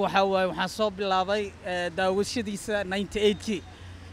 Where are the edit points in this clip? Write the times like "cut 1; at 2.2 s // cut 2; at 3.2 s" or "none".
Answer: none